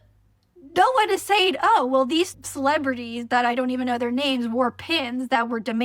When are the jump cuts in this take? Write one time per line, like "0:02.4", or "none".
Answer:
0:02.4